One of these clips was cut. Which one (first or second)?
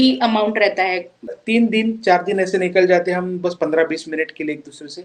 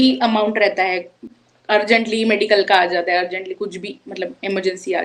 first